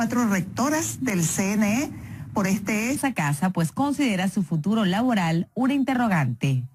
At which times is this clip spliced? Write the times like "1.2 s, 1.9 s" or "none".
none